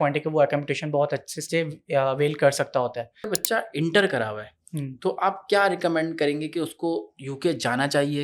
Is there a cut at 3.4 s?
yes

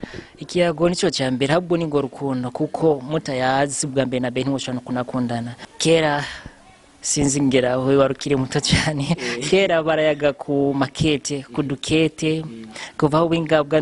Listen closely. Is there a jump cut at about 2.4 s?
no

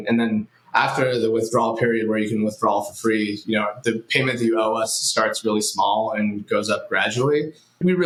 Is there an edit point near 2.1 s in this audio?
no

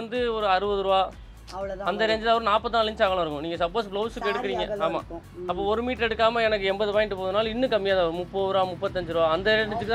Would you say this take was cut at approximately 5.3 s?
no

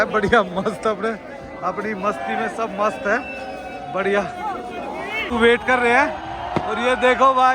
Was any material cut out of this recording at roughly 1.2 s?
no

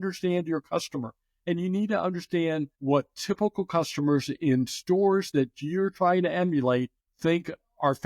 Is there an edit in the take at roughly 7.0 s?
yes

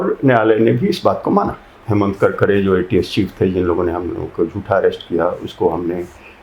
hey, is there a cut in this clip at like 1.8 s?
yes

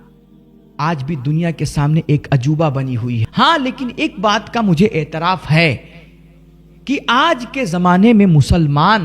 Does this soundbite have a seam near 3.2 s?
yes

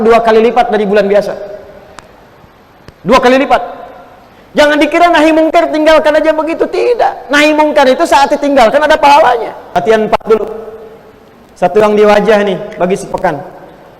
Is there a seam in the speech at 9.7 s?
yes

